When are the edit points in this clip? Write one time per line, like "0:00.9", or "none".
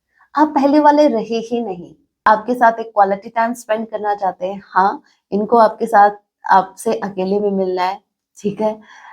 0:02.2

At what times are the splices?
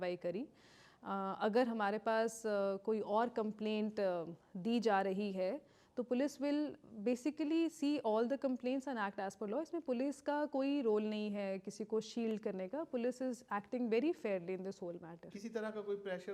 none

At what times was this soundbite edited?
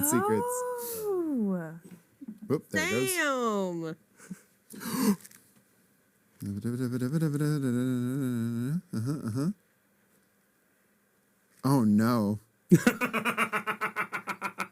none

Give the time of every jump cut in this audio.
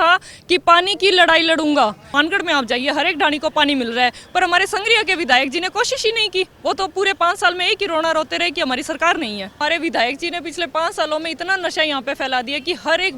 0:02.1
0:09.6

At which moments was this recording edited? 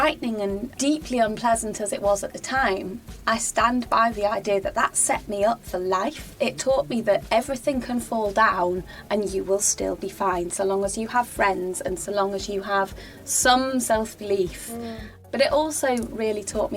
0:06.2

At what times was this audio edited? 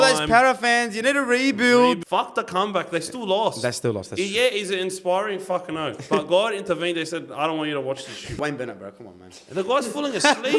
0:02.0
0:08.4

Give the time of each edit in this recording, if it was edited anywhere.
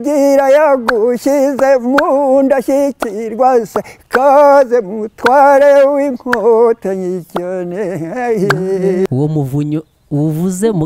0:09.1

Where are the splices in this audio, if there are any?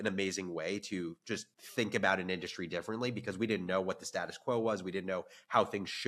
0:01.6

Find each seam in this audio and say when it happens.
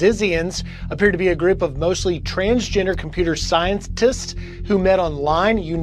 0:04.3

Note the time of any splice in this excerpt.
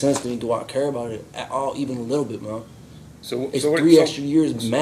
none

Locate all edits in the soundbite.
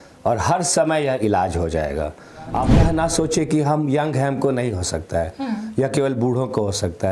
0:02.7

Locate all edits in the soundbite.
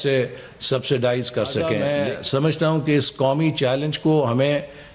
0:01.7

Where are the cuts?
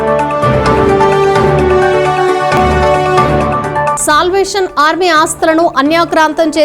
0:01.1

